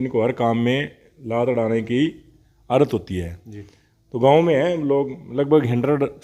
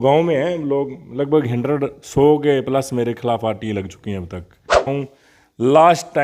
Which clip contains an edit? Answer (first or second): second